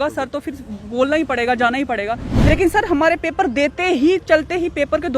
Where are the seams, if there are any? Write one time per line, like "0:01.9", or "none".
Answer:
0:02.5